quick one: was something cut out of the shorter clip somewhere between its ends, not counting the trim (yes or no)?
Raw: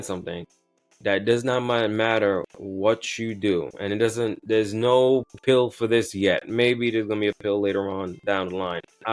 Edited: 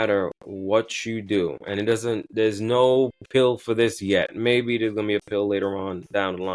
no